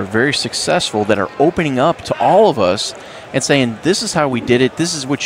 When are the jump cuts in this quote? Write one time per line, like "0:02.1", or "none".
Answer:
none